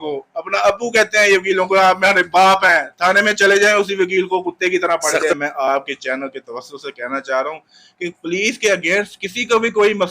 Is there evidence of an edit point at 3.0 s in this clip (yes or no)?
no